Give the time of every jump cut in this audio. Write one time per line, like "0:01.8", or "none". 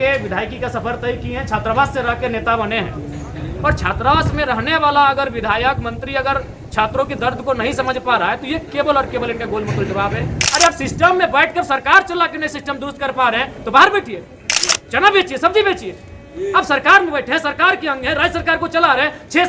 0:10.4